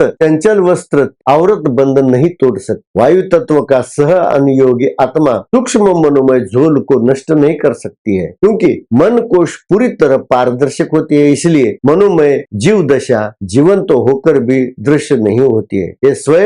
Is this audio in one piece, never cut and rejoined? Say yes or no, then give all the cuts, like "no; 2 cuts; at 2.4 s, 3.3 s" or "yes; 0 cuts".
no; 1 cut; at 1.2 s